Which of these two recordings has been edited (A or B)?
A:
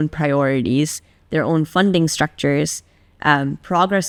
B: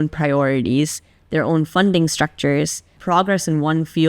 B